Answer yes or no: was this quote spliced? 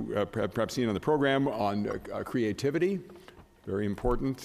no